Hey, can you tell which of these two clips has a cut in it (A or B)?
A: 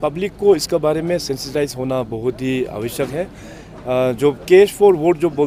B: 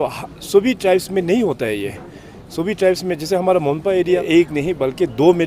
B